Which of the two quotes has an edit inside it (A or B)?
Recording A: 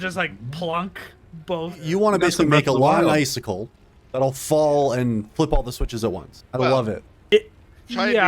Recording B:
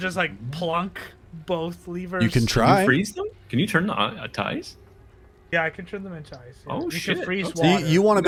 A